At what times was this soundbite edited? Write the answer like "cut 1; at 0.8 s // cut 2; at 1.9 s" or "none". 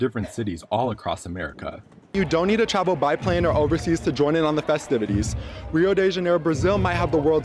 cut 1; at 2.1 s